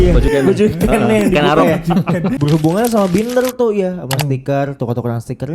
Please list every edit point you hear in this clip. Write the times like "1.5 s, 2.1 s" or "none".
2.4 s